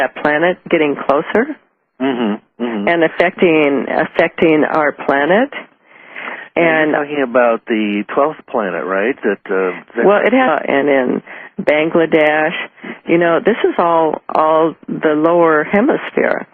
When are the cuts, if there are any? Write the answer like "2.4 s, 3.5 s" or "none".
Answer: none